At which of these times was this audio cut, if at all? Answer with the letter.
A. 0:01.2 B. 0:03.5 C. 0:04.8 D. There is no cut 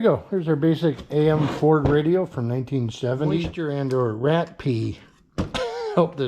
B